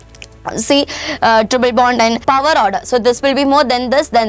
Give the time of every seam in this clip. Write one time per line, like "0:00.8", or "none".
0:02.2